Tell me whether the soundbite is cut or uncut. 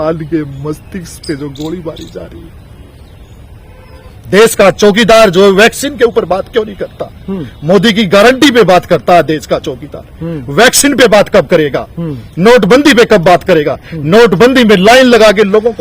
cut